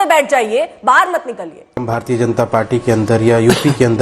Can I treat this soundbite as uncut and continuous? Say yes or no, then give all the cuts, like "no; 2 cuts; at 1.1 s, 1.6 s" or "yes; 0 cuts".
no; 1 cut; at 1.8 s